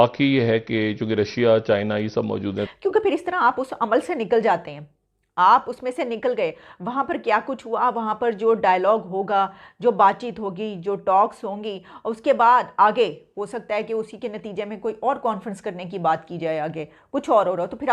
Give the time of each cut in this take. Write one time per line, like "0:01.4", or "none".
0:02.6